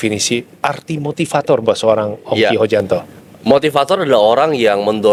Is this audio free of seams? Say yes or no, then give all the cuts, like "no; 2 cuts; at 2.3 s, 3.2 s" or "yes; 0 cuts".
yes; 0 cuts